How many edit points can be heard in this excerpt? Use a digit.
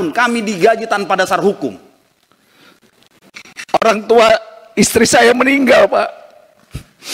1